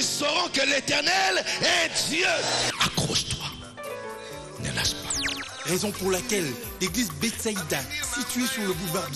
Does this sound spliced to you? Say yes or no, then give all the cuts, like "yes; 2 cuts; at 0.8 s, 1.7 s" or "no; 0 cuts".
no; 0 cuts